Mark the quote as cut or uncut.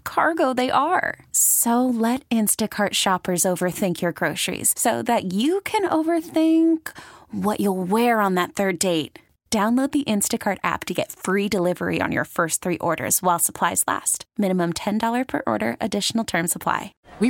uncut